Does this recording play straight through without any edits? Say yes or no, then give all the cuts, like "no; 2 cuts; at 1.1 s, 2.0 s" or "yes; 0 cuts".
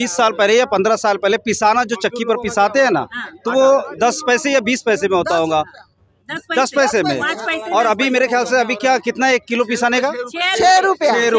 yes; 0 cuts